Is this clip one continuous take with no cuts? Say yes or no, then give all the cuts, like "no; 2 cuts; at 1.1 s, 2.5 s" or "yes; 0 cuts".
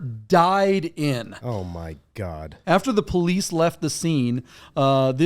no; 1 cut; at 2.5 s